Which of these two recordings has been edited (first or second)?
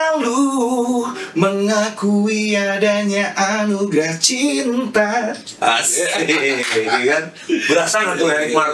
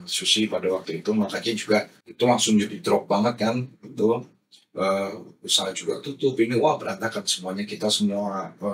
second